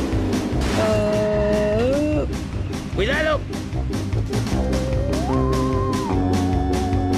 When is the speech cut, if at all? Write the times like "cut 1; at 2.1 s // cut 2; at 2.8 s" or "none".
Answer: cut 1; at 2.8 s